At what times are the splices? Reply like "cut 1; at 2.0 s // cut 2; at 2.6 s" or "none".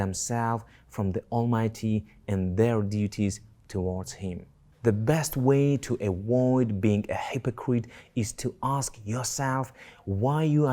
cut 1; at 4.6 s